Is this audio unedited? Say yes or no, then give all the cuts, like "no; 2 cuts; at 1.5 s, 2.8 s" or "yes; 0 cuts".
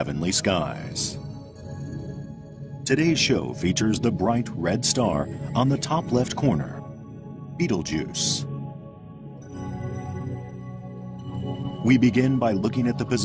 no; 1 cut; at 9.9 s